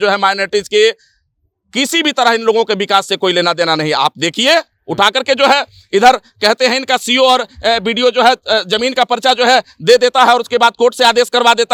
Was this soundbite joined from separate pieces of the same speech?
no; 0 cuts

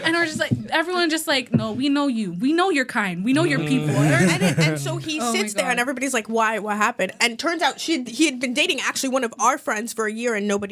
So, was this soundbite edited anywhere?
no; 0 cuts

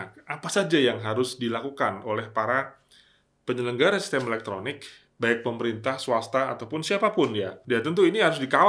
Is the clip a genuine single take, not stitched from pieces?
no; 1 cut; at 7.6 s

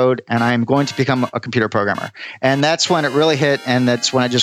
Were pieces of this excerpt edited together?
no; 0 cuts

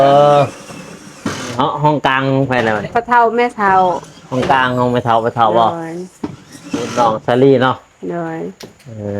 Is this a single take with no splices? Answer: no; 1 cut; at 2.9 s

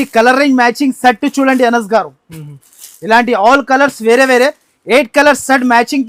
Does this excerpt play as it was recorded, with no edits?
yes; 0 cuts

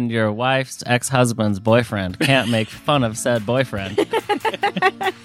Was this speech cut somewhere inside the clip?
no; 0 cuts

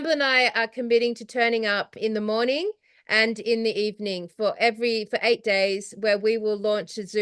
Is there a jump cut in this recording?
yes; 1 cut; at 1.9 s

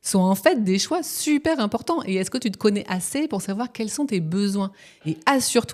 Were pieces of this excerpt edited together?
no; 0 cuts

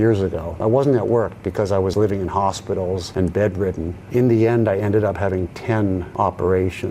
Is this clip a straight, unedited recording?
no; 2 cuts; at 1.9 s, 6.1 s

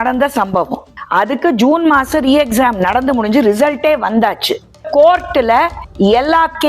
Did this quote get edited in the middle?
yes; 1 cut; at 4.8 s

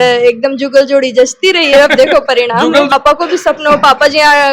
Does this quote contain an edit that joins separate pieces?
yes; 1 cut; at 2.9 s

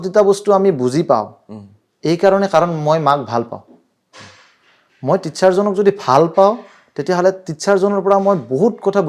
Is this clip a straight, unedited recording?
yes; 0 cuts

